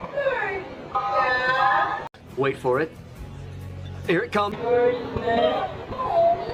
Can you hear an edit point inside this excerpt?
no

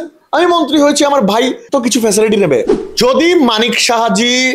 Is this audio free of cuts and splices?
no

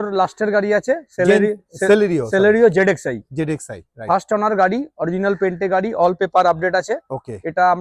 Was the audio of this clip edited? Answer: no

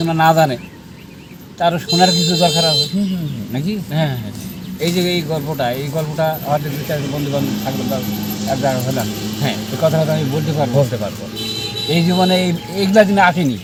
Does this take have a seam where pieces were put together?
no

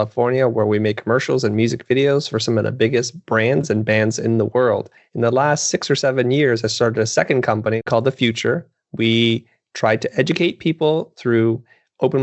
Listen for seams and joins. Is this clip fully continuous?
no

